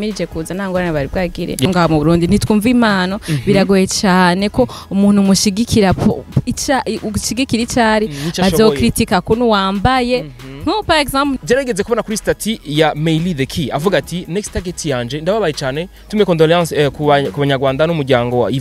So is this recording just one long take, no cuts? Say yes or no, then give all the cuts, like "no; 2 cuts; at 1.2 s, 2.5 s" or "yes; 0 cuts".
no; 2 cuts; at 1.6 s, 11.4 s